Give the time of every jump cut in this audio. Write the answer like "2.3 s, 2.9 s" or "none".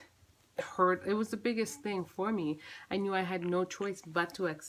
none

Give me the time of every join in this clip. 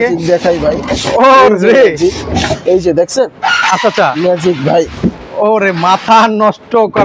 none

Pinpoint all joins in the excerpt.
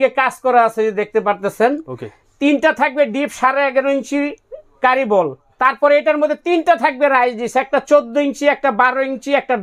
5.4 s

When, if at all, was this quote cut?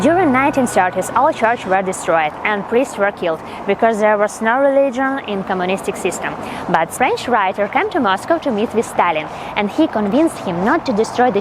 6.9 s

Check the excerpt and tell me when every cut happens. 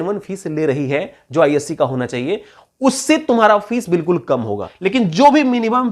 4.7 s

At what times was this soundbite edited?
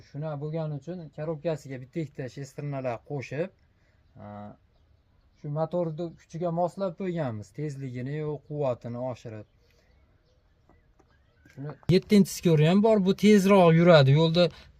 11.7 s

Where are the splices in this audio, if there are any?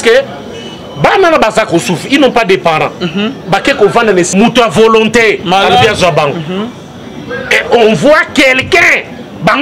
4.3 s

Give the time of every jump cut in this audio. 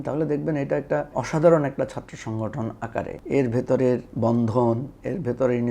1.1 s, 3.2 s, 4.1 s

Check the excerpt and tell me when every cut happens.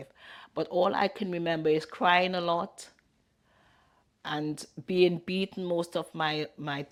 none

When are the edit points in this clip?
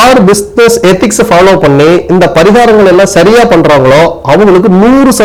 none

